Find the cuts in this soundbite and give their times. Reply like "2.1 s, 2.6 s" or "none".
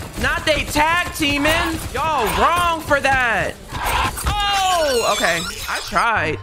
1.9 s, 3.7 s